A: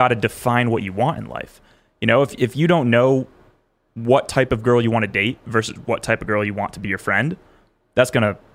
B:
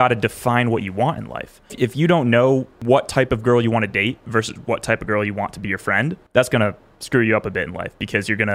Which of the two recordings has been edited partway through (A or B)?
B